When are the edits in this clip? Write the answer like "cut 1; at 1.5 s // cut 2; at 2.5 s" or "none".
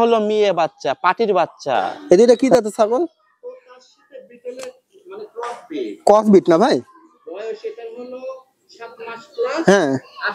cut 1; at 1.9 s